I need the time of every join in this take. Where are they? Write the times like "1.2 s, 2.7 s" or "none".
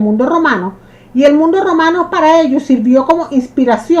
none